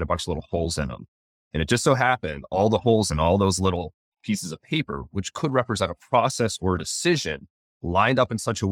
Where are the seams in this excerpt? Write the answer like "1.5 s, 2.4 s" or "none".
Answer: none